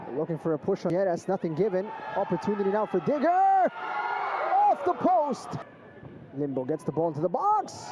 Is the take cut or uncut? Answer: cut